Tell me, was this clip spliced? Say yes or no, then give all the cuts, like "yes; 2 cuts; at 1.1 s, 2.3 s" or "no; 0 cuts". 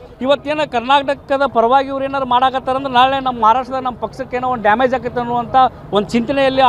no; 0 cuts